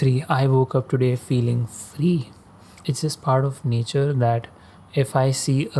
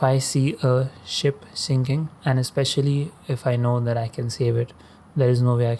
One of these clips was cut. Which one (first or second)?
first